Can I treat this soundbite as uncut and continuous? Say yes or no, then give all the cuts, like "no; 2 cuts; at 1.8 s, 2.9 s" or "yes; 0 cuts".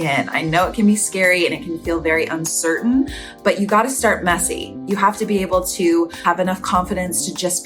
yes; 0 cuts